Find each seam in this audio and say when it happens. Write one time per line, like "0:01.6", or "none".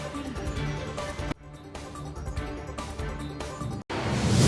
none